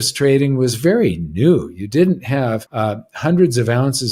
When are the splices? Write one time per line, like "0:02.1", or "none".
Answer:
0:02.7